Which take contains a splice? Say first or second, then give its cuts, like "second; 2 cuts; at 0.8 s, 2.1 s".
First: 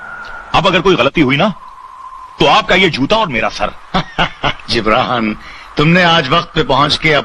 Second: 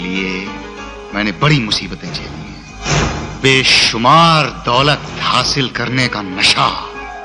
second; 1 cut; at 2.8 s